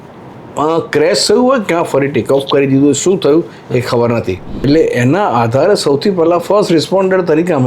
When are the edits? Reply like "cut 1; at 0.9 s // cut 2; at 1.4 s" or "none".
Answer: cut 1; at 4.6 s

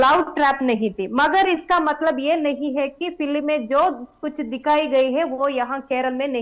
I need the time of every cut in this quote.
none

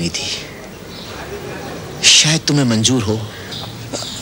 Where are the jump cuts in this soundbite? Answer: none

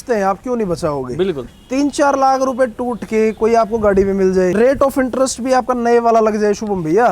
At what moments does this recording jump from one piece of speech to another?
cut 1; at 1.5 s // cut 2; at 4.5 s

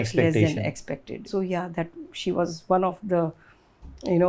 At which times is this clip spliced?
cut 1; at 1.2 s

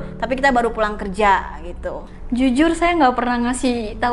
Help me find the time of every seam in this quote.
cut 1; at 2.0 s

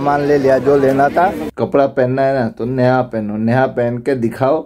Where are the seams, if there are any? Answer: cut 1; at 1.5 s

